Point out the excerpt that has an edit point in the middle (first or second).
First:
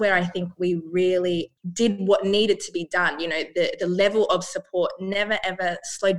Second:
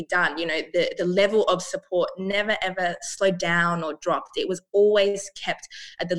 first